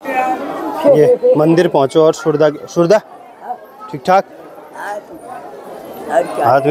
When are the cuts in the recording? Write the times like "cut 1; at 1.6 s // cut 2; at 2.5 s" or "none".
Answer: none